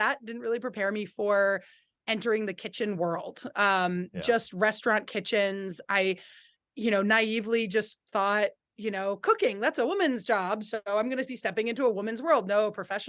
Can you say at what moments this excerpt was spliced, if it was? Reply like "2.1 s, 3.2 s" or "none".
none